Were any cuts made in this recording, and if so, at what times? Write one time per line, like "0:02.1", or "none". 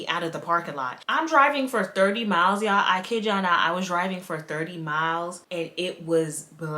0:01.0
0:05.4

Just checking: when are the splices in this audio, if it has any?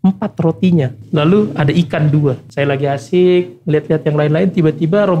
0:01.0
0:02.4

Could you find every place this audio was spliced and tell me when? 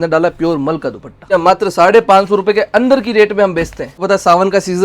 0:01.3
0:04.0

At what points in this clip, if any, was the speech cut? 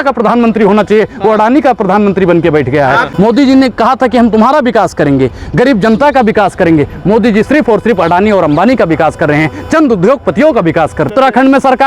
0:03.1
0:11.1

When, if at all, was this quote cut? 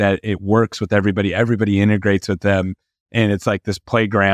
none

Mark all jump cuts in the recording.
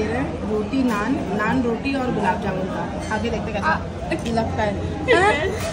none

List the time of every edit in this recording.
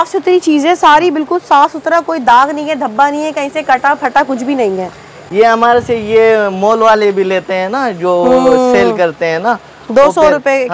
none

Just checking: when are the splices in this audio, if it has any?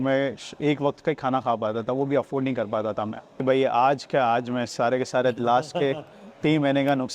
0:03.2

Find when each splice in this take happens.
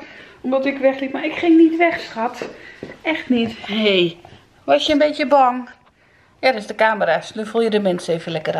none

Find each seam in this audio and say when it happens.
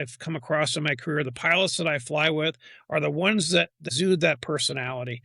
0:03.8

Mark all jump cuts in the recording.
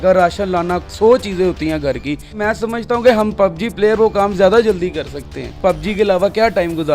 0:02.4
0:05.5

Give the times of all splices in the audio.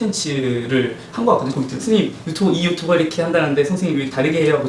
0:01.6

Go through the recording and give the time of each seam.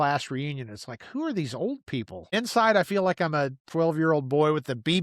0:02.3
0:03.6

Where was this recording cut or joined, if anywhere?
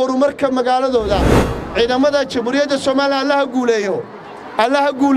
0:01.4

